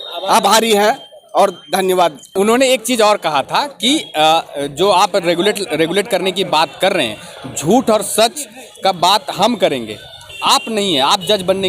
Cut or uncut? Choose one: uncut